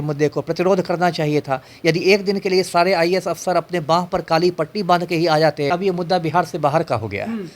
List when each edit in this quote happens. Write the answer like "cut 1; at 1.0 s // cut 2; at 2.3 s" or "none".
cut 1; at 5.7 s